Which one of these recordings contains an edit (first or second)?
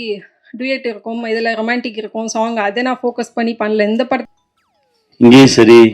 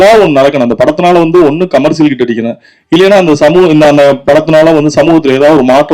first